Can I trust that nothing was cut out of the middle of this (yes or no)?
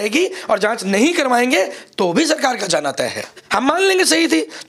no